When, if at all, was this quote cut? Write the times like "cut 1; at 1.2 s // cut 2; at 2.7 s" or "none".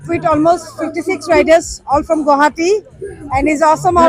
none